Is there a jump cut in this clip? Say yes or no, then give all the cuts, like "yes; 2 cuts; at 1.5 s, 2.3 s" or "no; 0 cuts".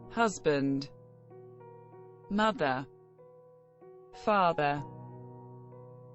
yes; 2 cuts; at 0.9 s, 2.2 s